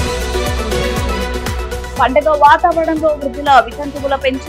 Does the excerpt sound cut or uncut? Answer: cut